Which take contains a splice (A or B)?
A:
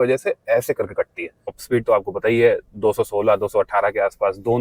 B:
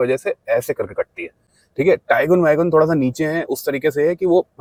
A